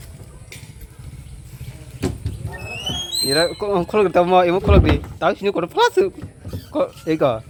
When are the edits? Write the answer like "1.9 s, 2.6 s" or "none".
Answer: none